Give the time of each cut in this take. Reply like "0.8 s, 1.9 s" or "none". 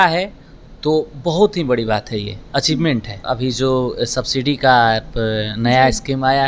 3.2 s